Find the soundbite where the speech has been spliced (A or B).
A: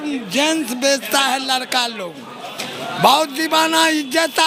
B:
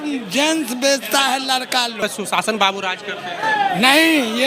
B